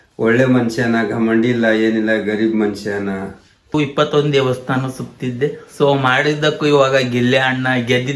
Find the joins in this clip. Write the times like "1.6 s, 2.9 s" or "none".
3.7 s